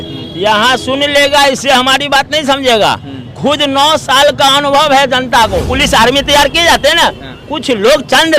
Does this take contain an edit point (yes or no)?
yes